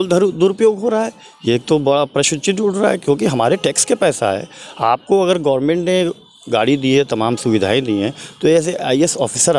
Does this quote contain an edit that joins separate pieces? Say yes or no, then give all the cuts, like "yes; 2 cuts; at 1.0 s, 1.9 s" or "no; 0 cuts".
no; 0 cuts